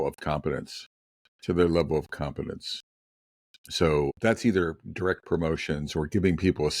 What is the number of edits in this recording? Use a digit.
1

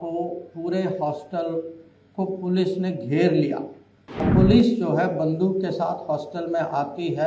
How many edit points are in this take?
1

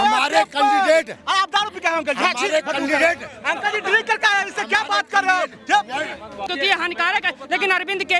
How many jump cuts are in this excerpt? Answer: 1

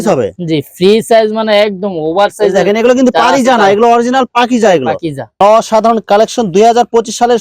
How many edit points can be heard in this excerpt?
1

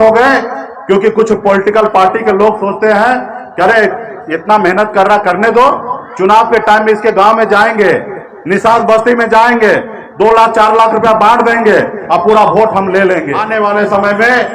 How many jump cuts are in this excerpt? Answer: 1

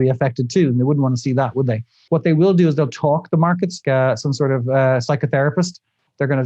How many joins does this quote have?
2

